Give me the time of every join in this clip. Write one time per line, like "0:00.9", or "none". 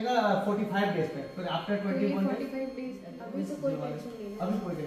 0:03.2